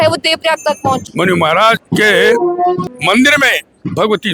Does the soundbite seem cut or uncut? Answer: cut